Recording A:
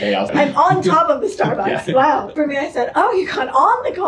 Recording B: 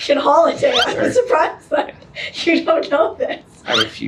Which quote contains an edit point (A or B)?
A